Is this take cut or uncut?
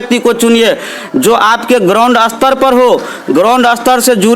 uncut